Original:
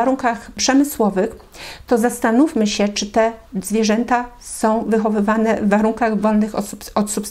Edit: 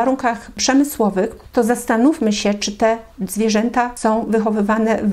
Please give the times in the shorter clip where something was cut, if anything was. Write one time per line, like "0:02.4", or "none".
0:01.4
0:03.9